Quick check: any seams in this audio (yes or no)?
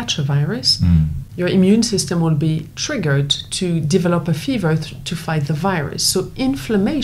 yes